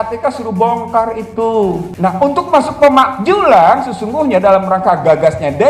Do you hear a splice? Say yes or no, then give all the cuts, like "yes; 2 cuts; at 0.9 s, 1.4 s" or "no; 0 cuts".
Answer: yes; 1 cut; at 1.9 s